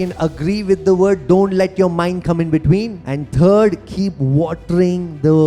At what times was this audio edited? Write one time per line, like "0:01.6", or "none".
0:03.0